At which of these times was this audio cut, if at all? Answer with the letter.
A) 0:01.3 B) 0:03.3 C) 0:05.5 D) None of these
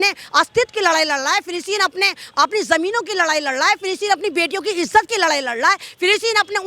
D